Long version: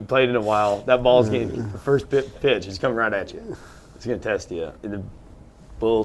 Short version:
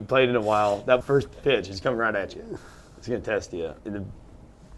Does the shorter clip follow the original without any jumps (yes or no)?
no